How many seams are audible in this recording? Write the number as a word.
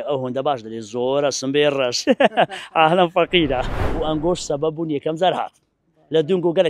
one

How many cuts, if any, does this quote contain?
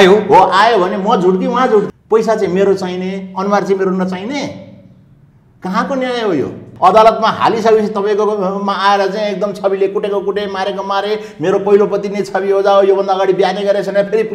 two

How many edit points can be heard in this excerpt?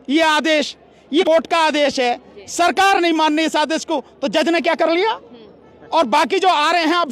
one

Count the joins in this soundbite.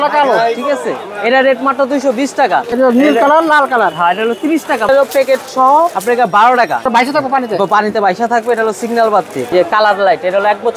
four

